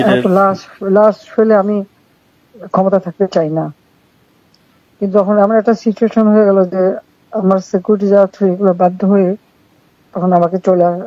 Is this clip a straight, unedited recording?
yes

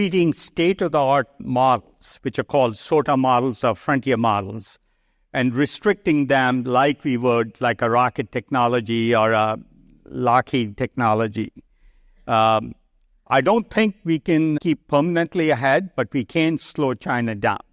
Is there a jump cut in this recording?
yes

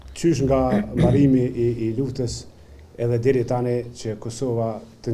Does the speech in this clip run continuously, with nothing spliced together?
yes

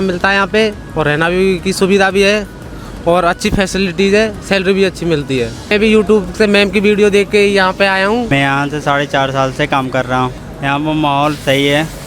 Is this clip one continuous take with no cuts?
no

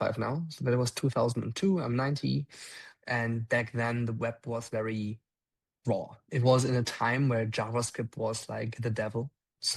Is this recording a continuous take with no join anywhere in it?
yes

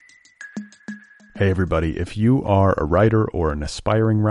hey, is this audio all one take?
no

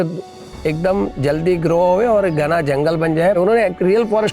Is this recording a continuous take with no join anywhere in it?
no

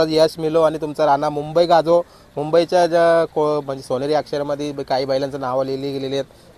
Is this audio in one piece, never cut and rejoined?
yes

